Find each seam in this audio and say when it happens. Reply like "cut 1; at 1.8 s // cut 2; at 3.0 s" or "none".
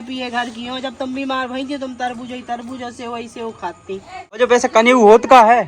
cut 1; at 4.4 s